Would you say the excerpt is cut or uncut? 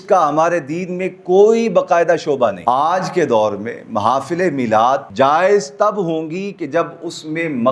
cut